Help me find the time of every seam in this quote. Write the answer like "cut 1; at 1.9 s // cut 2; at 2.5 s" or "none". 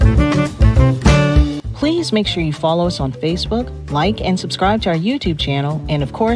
cut 1; at 1.7 s